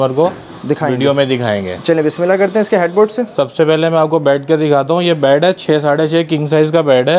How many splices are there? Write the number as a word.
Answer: zero